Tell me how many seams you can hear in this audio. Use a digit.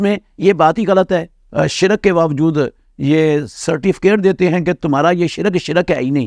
1